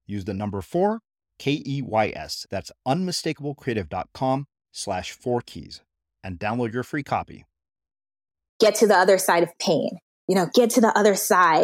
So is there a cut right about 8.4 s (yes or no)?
yes